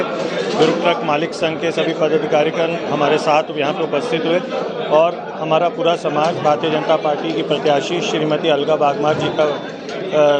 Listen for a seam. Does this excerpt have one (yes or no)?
no